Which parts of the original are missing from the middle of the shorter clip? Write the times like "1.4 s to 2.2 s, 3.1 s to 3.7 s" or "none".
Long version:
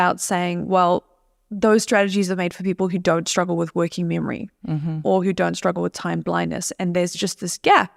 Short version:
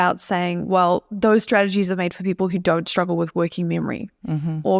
1.1 s to 1.5 s